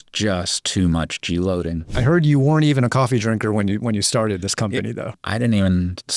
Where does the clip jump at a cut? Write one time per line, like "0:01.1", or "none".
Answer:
0:01.8
0:05.1